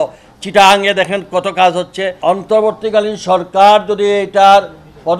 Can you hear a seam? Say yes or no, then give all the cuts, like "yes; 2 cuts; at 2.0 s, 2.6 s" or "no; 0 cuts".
yes; 1 cut; at 2.2 s